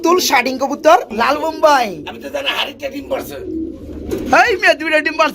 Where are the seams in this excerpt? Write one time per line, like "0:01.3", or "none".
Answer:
0:01.1